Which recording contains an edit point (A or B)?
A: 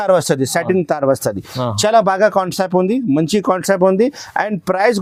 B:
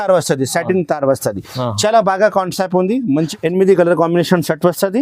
B